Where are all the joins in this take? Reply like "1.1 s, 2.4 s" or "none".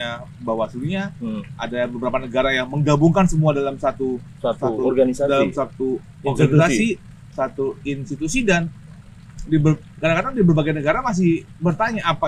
none